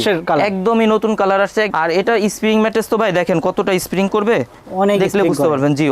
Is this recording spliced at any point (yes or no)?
yes